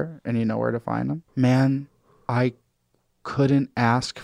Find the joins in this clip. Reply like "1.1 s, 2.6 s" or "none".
1.2 s